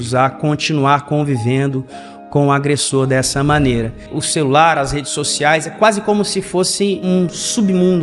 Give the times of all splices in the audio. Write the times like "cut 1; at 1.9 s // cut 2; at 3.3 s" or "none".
cut 1; at 4.0 s // cut 2; at 7.0 s